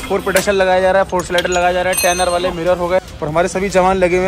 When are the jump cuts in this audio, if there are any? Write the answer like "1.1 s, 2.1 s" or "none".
3.1 s